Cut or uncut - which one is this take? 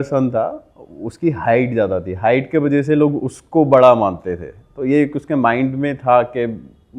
uncut